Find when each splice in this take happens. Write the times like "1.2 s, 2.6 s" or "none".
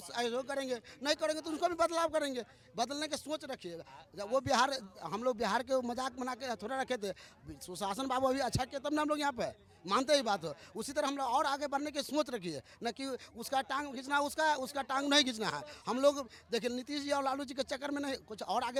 none

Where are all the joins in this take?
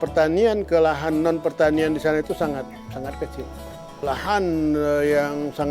4.0 s

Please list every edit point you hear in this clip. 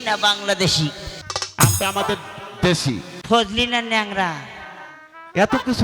1.1 s, 3.1 s

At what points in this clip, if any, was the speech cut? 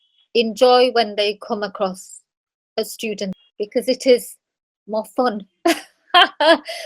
3.3 s

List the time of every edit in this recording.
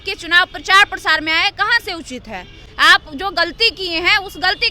none

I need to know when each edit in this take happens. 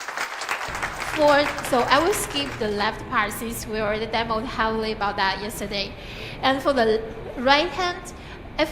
0.9 s

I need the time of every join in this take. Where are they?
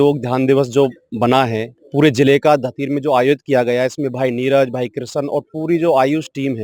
1.7 s

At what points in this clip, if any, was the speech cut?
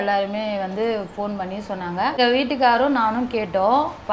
2.2 s

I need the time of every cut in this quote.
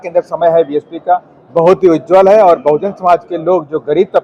none

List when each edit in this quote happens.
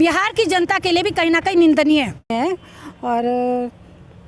2.3 s

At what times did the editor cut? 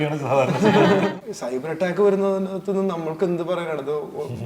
1.1 s

